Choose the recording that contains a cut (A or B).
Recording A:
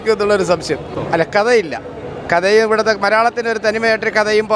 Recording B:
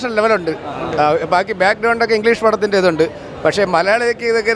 A